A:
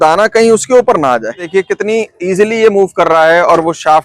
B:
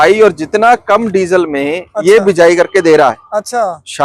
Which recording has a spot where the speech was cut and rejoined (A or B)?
A